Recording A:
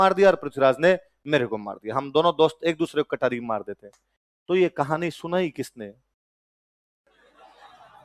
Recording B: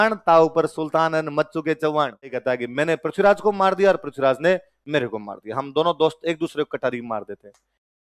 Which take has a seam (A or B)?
B